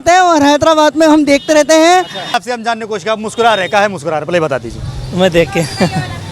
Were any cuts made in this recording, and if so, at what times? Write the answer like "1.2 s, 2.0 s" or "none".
2.4 s